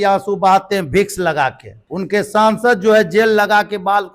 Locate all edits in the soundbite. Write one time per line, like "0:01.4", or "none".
0:01.8